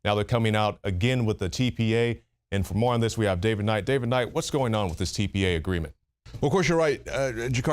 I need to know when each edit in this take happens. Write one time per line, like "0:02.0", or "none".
0:02.6